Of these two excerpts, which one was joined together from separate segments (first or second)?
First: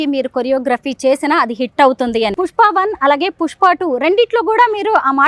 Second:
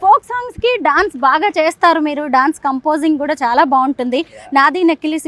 first